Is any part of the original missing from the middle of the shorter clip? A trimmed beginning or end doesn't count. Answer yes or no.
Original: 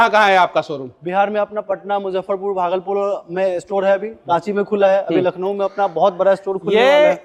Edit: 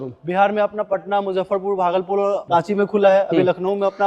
yes